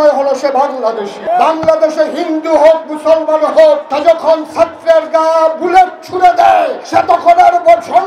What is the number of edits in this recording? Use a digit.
3